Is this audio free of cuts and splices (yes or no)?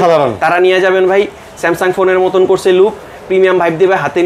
yes